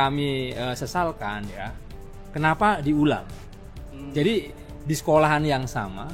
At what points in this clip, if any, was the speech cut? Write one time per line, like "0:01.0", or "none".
none